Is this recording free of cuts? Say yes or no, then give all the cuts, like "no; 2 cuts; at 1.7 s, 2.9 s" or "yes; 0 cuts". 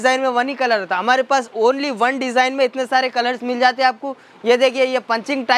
yes; 0 cuts